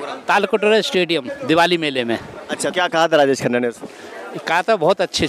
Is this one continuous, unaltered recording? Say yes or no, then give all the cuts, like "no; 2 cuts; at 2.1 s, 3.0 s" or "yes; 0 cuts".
no; 1 cut; at 2.7 s